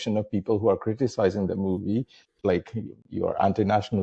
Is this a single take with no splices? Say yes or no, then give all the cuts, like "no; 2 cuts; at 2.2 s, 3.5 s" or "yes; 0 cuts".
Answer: no; 1 cut; at 2.3 s